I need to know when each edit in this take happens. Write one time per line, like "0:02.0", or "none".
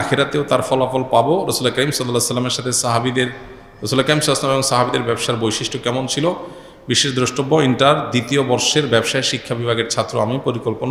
none